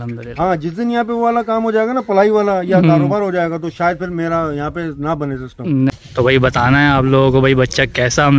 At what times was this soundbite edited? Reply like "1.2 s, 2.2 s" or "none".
5.9 s